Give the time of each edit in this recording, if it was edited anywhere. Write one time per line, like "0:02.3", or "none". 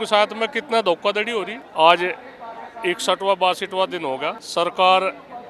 none